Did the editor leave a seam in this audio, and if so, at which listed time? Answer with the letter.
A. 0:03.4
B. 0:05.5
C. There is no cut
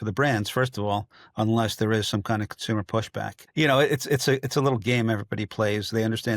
A